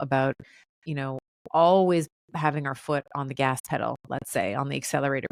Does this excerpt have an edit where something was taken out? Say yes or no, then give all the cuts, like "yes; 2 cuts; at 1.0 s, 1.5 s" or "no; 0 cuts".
no; 0 cuts